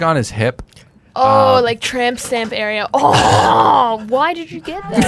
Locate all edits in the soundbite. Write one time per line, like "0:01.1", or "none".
none